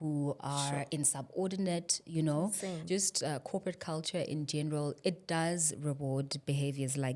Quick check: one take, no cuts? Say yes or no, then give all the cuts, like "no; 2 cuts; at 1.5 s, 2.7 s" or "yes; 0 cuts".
no; 1 cut; at 2.8 s